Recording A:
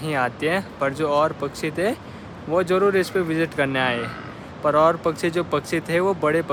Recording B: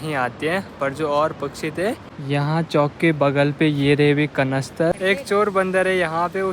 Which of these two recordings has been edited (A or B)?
B